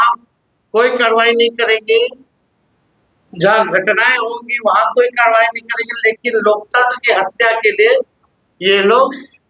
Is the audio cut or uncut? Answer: uncut